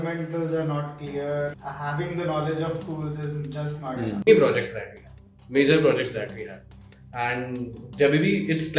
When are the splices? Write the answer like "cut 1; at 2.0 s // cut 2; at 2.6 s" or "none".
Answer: cut 1; at 1.6 s // cut 2; at 4.3 s